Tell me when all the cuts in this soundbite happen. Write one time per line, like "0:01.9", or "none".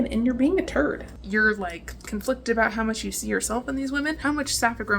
0:01.1
0:04.2